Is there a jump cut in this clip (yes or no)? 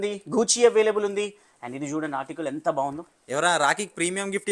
no